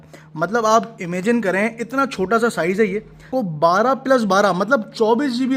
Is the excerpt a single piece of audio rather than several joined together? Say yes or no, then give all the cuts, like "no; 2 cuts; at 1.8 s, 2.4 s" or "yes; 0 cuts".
no; 1 cut; at 3.3 s